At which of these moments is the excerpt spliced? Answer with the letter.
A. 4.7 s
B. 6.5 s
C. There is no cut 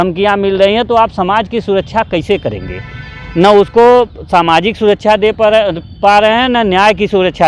C